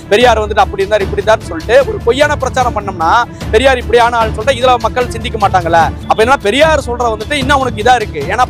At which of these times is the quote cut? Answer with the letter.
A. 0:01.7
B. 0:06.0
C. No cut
B